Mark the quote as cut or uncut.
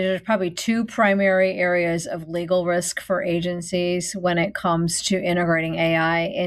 uncut